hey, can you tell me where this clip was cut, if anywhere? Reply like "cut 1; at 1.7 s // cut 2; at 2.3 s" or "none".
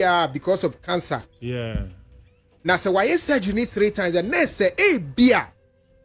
none